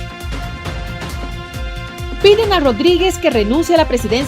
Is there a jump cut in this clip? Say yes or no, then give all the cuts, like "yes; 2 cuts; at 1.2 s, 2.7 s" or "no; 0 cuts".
yes; 1 cut; at 1.3 s